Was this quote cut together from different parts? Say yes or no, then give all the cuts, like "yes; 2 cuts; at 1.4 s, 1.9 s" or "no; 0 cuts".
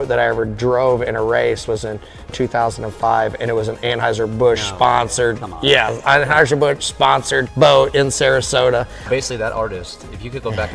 yes; 2 cuts; at 2.3 s, 9.1 s